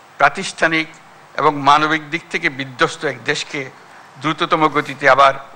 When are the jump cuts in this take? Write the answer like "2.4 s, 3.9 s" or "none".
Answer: none